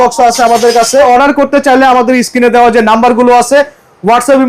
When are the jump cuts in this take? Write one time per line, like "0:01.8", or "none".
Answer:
0:01.1